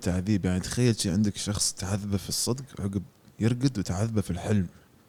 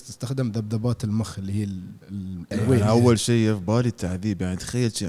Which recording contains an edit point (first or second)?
second